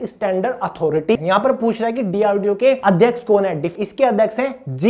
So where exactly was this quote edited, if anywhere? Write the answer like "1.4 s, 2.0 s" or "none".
1.1 s, 2.8 s, 3.7 s